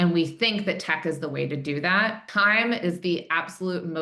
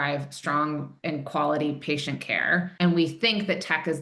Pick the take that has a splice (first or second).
first